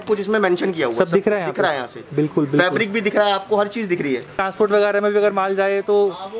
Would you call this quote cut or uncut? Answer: cut